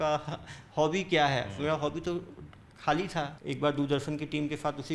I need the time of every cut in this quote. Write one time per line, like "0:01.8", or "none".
0:03.4